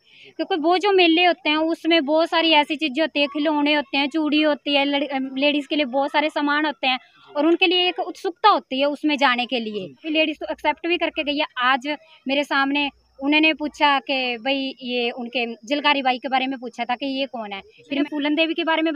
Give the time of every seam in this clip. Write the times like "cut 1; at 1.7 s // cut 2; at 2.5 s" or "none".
cut 1; at 10.1 s // cut 2; at 18.0 s

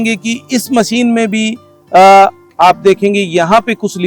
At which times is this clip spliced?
none

